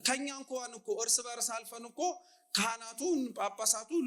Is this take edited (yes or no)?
no